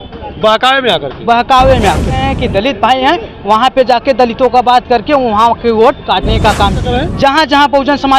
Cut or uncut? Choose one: cut